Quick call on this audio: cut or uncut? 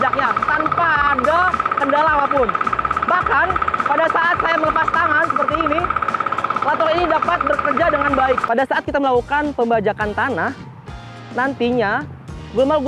cut